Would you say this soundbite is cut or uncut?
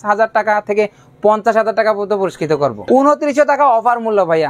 cut